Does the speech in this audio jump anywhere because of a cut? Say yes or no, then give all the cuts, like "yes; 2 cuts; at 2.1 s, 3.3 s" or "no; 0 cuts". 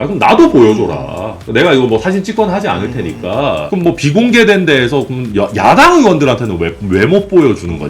no; 0 cuts